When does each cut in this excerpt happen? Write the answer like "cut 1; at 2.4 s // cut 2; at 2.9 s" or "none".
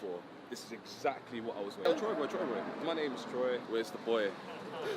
cut 1; at 1.9 s // cut 2; at 2.7 s // cut 3; at 3.6 s